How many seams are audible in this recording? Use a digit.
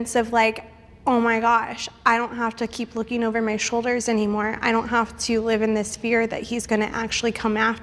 0